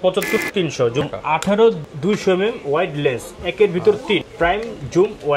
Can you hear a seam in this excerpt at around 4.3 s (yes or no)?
yes